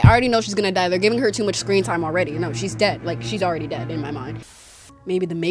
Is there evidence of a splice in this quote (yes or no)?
yes